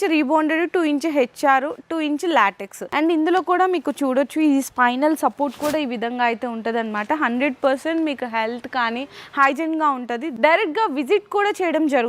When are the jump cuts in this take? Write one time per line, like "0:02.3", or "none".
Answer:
0:02.8
0:10.3